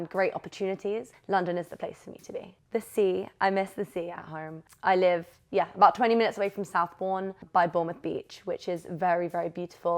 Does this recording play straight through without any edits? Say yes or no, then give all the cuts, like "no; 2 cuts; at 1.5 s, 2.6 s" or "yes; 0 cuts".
no; 2 cuts; at 4.6 s, 7.4 s